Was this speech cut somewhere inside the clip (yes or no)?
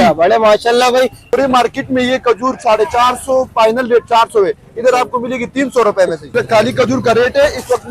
yes